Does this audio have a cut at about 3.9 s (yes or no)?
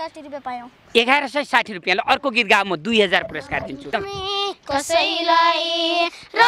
yes